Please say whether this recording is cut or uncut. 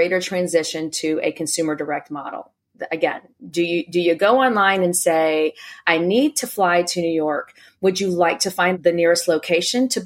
cut